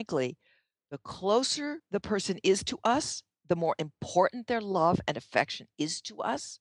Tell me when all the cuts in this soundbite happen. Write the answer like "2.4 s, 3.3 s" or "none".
1.8 s